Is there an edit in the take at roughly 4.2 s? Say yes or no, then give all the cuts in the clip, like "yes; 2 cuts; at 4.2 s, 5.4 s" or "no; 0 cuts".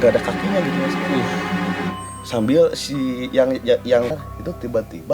yes; 1 cut; at 4.2 s